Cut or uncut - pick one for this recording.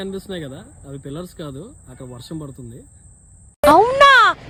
uncut